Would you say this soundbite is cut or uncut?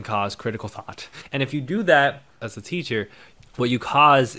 cut